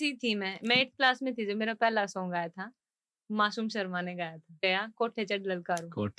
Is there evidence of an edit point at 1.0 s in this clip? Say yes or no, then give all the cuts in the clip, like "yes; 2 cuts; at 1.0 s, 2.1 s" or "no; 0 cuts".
no; 1 cut; at 4.6 s